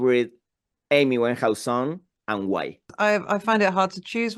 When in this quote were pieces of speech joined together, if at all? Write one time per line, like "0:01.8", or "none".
0:02.8